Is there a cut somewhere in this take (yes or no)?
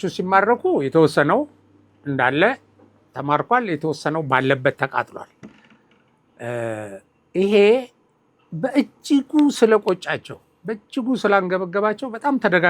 no